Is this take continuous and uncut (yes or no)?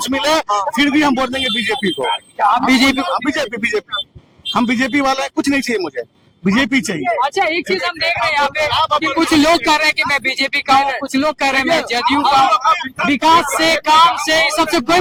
yes